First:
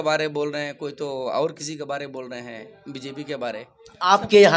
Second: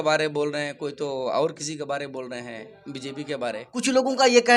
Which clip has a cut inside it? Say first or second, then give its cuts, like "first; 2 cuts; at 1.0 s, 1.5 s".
second; 1 cut; at 3.7 s